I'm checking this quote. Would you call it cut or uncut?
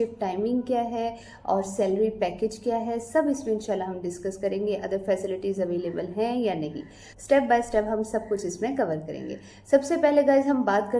uncut